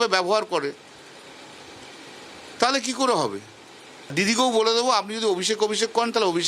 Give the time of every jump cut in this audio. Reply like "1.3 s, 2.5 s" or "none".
4.1 s